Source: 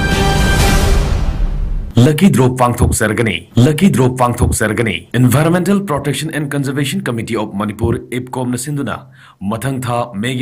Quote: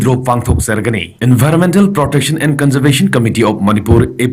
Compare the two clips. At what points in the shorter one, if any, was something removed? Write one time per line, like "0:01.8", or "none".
0:01.0